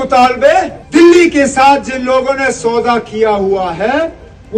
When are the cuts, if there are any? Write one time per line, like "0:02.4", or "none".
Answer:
none